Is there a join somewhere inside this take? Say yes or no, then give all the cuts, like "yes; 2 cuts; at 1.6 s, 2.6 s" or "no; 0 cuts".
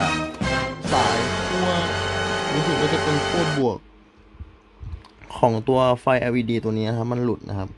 no; 0 cuts